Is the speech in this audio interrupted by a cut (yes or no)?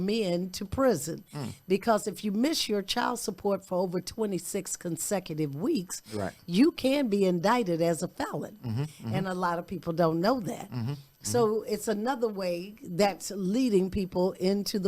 no